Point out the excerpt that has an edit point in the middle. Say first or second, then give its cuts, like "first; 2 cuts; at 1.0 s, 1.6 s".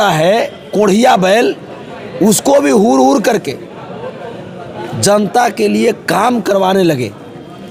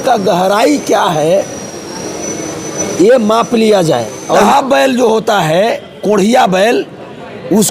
second; 1 cut; at 4.4 s